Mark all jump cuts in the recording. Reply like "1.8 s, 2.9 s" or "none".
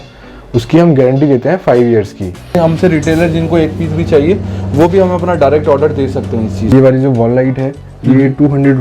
2.6 s, 6.7 s